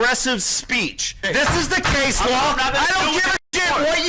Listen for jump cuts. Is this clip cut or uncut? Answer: cut